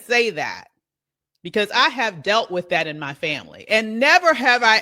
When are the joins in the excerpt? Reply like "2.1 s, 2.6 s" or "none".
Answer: none